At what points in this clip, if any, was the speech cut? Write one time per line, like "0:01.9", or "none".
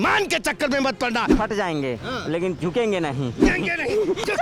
0:01.3
0:03.5